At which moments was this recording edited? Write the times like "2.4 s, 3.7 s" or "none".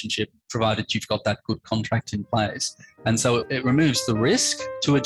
3.4 s